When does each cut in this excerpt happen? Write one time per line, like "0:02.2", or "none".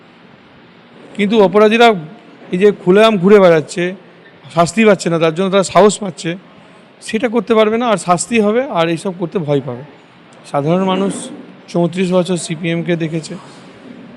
0:09.9